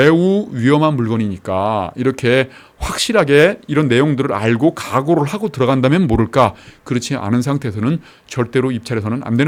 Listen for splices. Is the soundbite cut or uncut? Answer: uncut